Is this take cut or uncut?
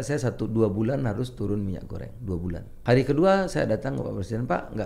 cut